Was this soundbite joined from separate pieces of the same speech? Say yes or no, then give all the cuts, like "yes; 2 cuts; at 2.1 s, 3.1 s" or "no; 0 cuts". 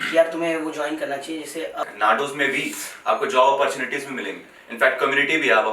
yes; 1 cut; at 1.8 s